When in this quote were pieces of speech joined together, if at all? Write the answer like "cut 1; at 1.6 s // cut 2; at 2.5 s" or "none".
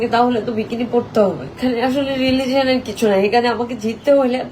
cut 1; at 1.5 s